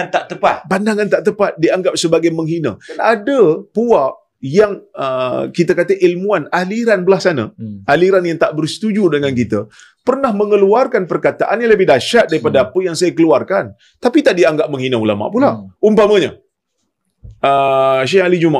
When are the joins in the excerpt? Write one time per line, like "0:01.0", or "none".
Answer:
0:02.9